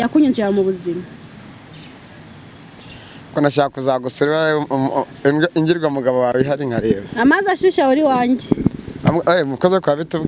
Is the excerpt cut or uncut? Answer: uncut